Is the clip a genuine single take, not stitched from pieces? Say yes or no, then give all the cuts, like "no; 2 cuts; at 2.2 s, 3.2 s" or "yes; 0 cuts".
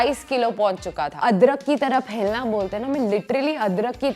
no; 1 cut; at 1.2 s